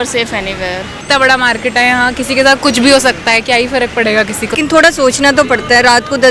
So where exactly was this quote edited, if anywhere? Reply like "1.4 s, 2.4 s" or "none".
1.0 s, 4.5 s